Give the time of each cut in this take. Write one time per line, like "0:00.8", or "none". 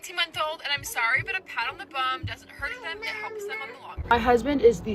0:03.9